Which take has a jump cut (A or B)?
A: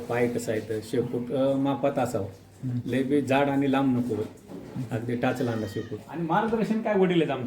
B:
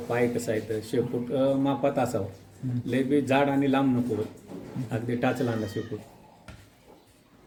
A